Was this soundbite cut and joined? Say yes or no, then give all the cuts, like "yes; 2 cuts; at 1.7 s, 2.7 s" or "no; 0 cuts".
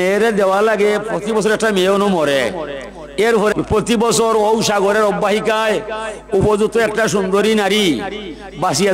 yes; 1 cut; at 3.5 s